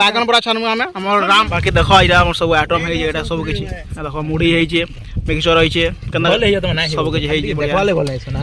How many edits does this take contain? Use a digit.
1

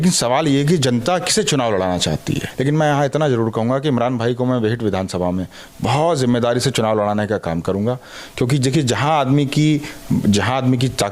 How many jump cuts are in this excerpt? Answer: 1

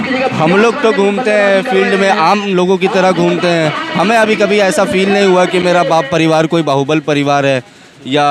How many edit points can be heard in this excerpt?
0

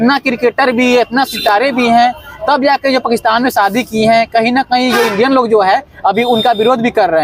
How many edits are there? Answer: 0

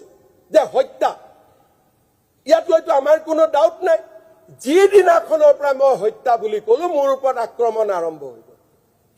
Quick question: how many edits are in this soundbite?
0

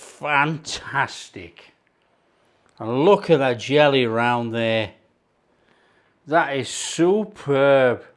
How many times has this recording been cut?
0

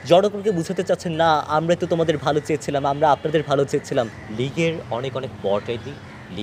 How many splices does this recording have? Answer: 1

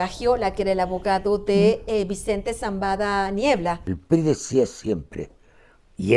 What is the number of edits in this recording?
1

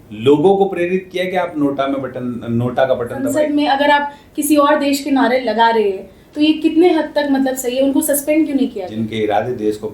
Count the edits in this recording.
2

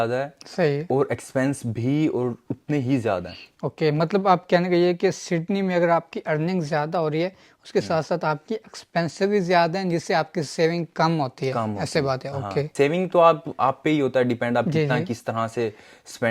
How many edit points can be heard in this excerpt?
0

